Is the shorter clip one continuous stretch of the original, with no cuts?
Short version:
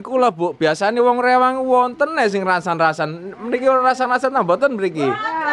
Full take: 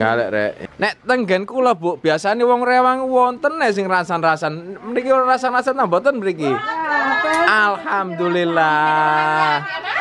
yes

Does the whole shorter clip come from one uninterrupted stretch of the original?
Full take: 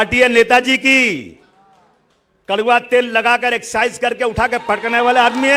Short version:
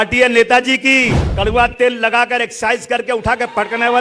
no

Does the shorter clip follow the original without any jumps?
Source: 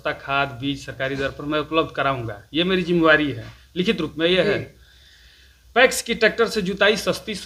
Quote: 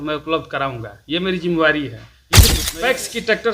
no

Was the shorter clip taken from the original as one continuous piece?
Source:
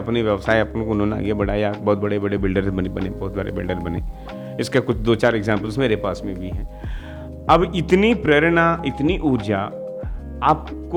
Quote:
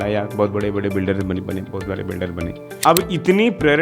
no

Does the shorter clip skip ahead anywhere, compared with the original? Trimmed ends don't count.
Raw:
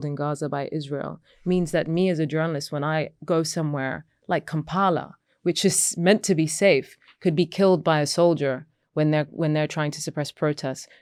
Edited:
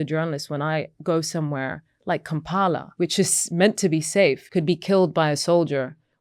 yes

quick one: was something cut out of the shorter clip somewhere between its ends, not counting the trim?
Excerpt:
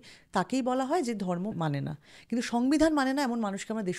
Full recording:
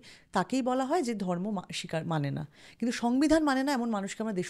yes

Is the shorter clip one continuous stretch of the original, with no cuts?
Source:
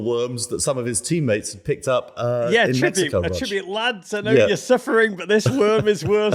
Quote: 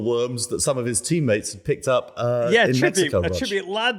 yes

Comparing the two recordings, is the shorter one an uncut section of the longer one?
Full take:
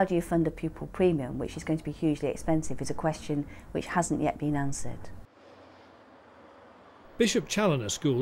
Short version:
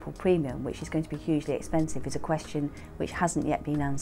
yes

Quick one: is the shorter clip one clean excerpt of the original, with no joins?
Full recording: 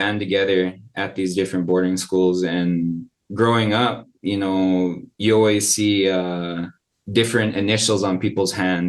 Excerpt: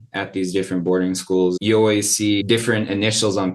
no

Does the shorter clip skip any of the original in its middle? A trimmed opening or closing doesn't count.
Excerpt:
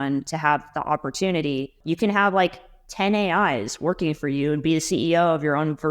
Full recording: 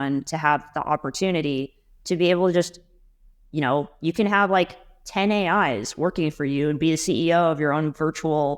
yes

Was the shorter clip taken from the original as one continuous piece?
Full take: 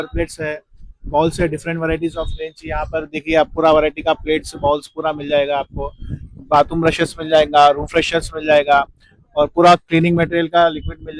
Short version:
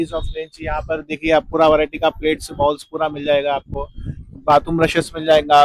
yes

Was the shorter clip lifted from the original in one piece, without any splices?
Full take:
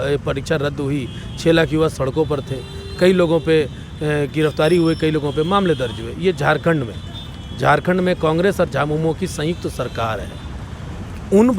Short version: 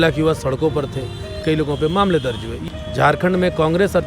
no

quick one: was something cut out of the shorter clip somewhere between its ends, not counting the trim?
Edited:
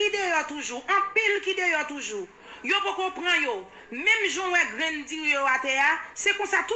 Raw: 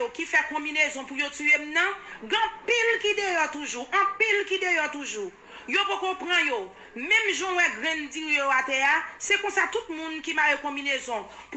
no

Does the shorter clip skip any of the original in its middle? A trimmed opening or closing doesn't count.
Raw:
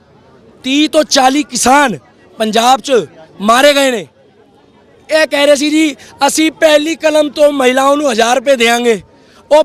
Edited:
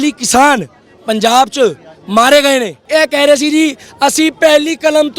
yes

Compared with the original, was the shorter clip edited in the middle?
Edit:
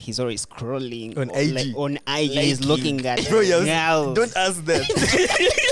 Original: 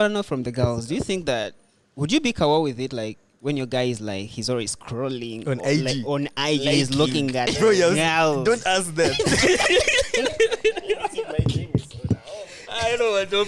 no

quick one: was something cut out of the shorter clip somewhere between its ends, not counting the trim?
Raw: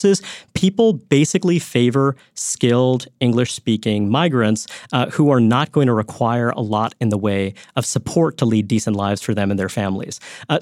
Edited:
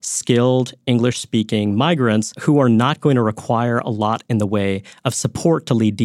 yes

